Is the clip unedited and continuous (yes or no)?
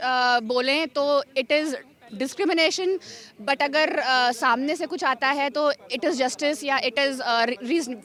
yes